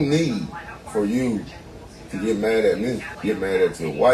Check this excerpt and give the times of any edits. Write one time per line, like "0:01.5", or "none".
0:03.1